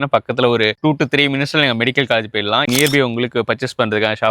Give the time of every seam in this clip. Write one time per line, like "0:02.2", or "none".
0:02.7